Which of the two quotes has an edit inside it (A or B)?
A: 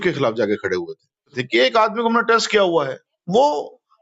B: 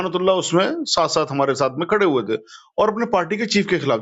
A